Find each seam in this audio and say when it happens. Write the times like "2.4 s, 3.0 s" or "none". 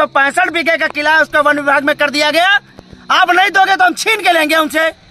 none